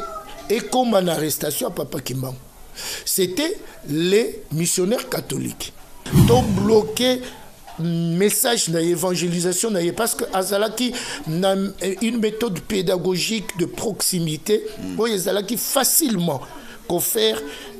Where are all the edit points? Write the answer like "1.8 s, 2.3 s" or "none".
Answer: 6.1 s